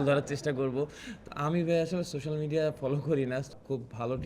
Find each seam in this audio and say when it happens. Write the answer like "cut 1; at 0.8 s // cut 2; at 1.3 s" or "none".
cut 1; at 1.1 s // cut 2; at 3.5 s